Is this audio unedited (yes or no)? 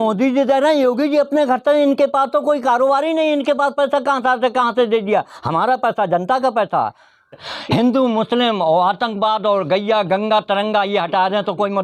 no